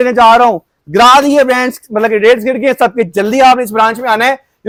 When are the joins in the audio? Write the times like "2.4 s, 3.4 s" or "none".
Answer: none